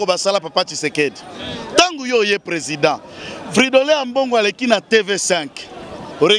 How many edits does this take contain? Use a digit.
0